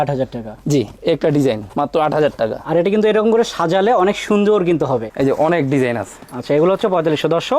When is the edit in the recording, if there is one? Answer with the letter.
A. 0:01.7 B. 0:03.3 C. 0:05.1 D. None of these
C